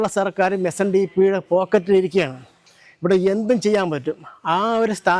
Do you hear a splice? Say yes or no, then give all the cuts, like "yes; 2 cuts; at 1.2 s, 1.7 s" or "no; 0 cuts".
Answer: no; 0 cuts